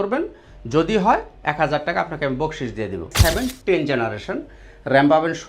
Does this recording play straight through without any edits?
no; 1 cut; at 3.1 s

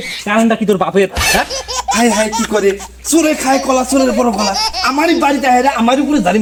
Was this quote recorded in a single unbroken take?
yes; 0 cuts

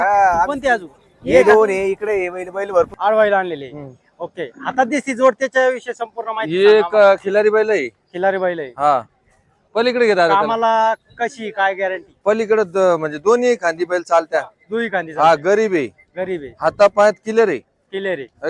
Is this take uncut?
no; 1 cut; at 2.9 s

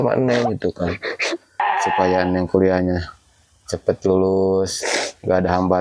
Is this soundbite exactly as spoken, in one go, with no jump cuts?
no; 1 cut; at 1.6 s

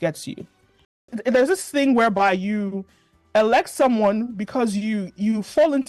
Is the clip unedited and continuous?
no; 1 cut; at 1.1 s

